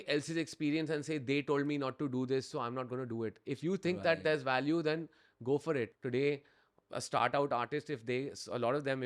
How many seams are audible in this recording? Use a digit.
1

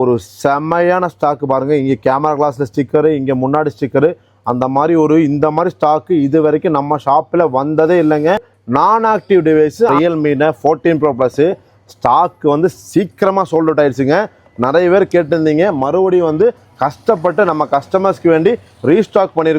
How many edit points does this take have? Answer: 2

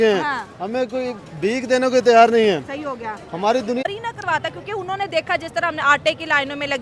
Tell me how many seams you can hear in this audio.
1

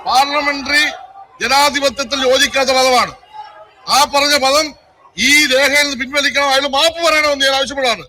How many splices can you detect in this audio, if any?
0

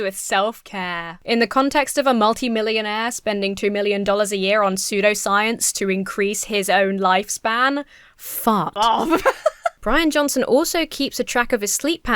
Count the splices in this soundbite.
2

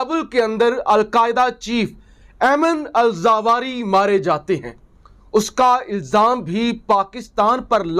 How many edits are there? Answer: 0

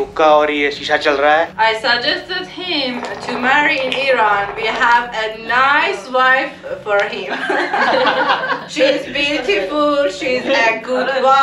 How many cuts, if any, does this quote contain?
2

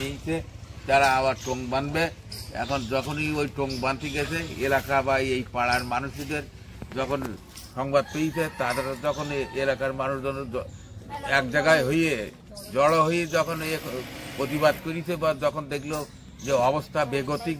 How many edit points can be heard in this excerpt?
0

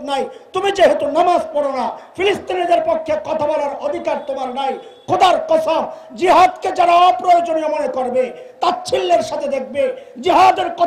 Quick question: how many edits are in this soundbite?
0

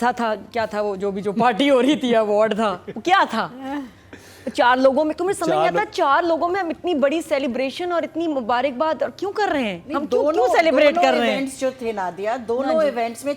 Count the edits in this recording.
0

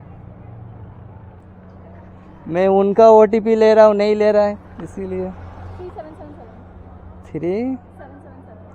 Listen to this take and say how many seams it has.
1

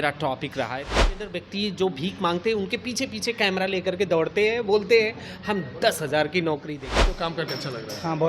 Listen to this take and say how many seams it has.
2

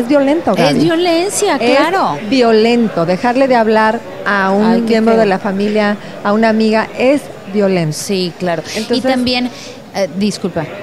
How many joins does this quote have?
1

